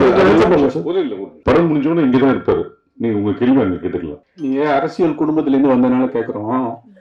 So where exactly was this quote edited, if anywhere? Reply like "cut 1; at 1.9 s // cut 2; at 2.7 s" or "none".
cut 1; at 1.3 s // cut 2; at 4.1 s